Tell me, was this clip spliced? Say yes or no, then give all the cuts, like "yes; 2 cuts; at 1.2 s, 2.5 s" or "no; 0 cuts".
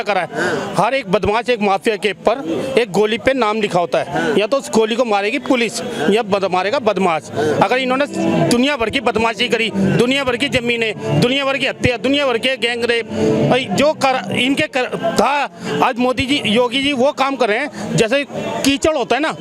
no; 0 cuts